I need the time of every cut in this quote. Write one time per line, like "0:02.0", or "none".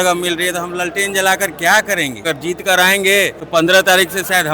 0:02.2
0:03.4